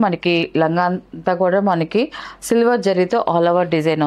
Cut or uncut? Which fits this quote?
uncut